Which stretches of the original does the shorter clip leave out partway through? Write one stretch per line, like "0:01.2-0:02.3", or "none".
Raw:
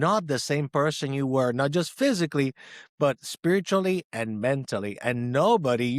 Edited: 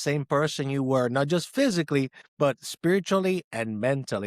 0:02.6-0:02.8